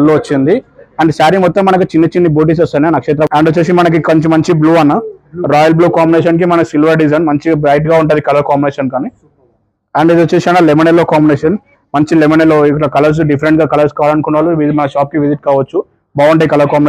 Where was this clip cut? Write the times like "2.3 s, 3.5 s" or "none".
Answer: 3.3 s